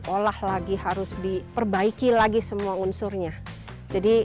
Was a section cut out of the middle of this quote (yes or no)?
yes